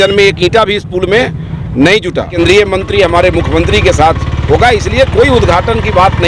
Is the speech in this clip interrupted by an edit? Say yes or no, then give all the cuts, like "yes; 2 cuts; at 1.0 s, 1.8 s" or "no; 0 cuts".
yes; 1 cut; at 2.3 s